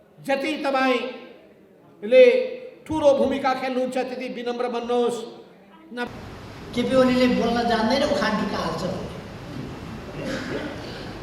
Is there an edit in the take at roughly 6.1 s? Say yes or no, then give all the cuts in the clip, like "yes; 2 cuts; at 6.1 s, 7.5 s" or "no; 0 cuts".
yes; 1 cut; at 6.1 s